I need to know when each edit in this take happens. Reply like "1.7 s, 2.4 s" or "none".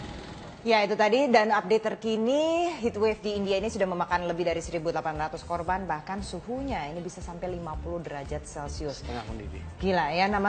none